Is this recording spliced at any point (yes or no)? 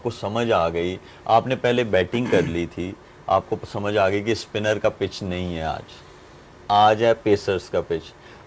no